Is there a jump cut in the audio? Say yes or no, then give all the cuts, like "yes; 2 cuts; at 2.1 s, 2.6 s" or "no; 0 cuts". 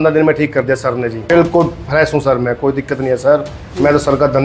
yes; 1 cut; at 1.3 s